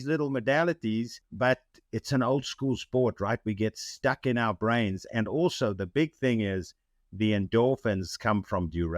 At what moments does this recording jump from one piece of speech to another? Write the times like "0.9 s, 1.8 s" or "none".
1.2 s